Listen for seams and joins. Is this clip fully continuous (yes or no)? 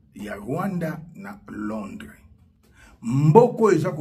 yes